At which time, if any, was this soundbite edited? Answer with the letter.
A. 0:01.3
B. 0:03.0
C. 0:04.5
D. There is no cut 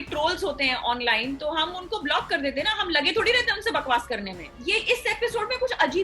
C